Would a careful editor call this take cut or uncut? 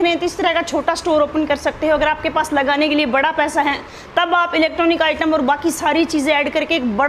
uncut